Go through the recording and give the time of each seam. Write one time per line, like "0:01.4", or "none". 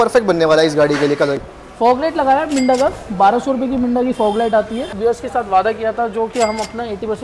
0:01.4
0:04.9